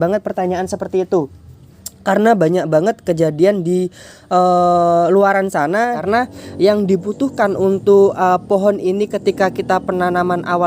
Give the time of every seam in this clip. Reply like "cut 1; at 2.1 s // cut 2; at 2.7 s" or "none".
cut 1; at 6.0 s